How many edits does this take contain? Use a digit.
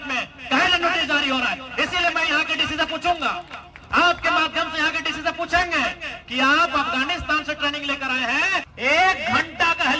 1